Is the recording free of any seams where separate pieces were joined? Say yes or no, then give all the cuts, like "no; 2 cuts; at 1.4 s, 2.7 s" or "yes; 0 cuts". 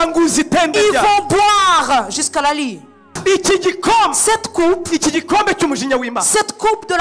no; 1 cut; at 3.1 s